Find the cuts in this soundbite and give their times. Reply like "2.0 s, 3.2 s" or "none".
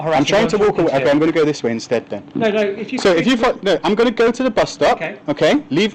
none